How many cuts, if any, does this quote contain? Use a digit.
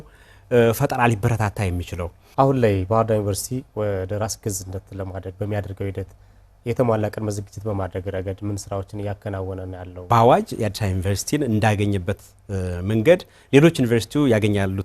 2